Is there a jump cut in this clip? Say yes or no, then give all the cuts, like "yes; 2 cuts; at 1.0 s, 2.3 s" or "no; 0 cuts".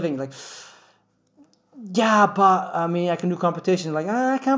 no; 0 cuts